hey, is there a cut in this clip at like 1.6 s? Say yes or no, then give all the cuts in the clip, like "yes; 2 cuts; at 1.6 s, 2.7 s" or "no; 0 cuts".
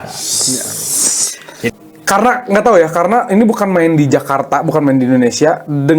yes; 1 cut; at 1.6 s